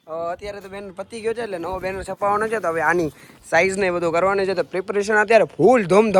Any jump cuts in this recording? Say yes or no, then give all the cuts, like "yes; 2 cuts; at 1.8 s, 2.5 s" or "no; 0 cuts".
no; 0 cuts